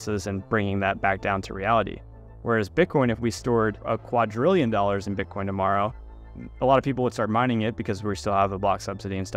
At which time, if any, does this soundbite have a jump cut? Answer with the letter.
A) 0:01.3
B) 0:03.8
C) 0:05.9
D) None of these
B